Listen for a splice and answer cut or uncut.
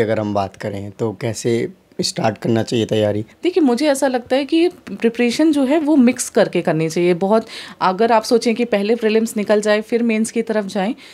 cut